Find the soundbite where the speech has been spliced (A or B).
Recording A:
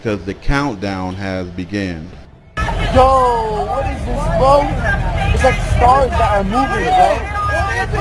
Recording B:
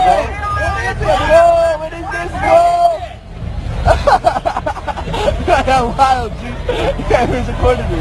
B